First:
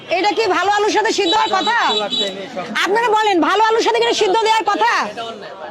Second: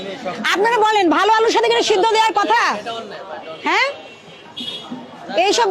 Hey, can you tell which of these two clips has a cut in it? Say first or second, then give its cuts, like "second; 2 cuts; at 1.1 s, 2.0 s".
first; 1 cut; at 1.3 s